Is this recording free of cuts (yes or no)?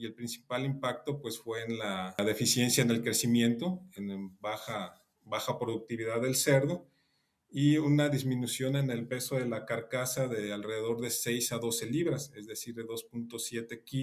no